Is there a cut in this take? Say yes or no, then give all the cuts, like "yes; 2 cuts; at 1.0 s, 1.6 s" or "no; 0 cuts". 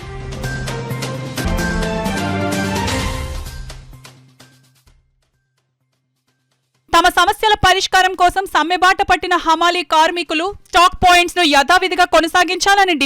yes; 1 cut; at 1.4 s